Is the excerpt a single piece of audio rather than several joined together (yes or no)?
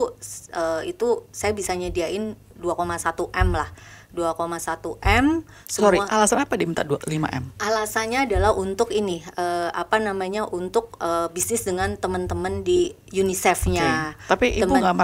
yes